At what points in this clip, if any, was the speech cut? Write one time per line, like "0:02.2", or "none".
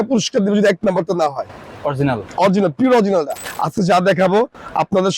0:03.4